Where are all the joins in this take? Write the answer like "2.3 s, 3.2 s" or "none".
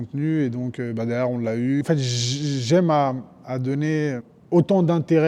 1.8 s, 4.3 s